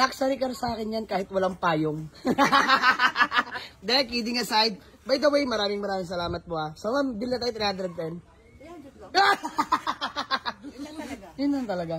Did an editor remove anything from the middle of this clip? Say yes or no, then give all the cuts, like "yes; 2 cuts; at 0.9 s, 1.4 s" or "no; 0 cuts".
no; 0 cuts